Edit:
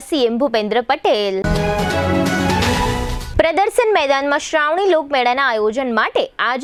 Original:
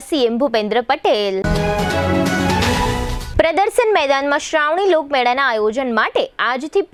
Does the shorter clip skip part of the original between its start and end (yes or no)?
no